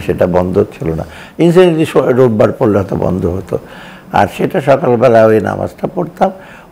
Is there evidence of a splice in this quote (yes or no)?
no